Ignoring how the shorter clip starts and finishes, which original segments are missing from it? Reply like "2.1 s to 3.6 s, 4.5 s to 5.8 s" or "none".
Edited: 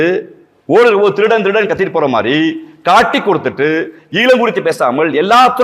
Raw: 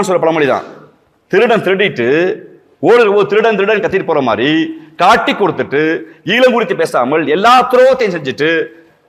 none